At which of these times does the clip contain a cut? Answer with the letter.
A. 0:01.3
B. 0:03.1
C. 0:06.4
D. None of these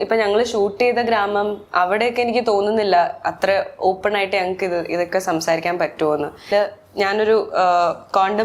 C